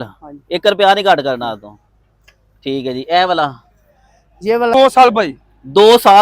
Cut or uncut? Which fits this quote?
cut